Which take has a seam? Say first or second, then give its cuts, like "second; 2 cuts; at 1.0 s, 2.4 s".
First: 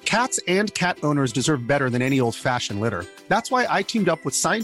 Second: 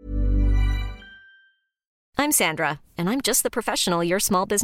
second; 1 cut; at 1.9 s